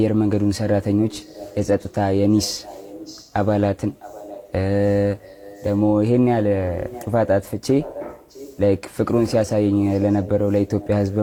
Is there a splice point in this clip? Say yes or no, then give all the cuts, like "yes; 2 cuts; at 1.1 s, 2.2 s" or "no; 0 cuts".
no; 0 cuts